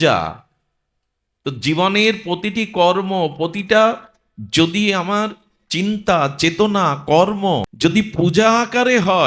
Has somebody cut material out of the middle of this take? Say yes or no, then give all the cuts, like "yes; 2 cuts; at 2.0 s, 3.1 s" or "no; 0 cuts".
yes; 1 cut; at 7.7 s